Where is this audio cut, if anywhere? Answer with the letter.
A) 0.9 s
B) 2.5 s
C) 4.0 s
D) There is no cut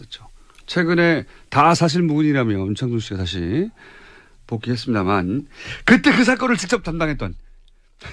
D